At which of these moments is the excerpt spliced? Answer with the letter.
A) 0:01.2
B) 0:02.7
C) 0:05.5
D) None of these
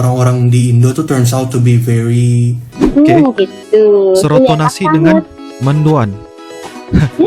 B